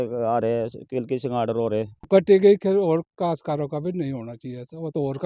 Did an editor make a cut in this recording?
yes; 1 cut; at 2.1 s

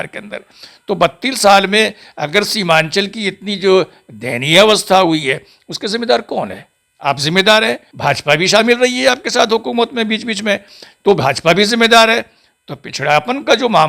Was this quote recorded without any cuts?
no; 1 cut; at 7.9 s

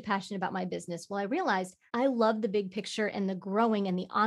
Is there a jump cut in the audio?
yes; 1 cut; at 1.8 s

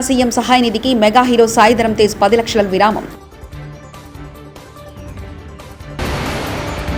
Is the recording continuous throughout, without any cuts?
yes; 0 cuts

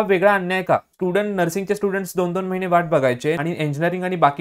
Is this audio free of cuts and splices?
no; 2 cuts; at 0.9 s, 3.4 s

